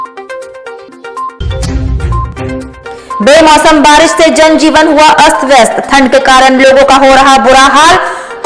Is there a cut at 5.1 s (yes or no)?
no